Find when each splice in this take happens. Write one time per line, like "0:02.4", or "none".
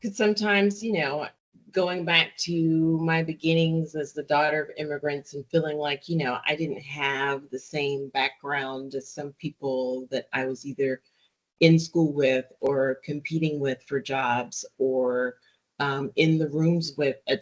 0:01.4